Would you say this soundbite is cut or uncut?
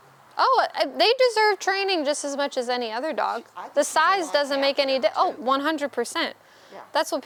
uncut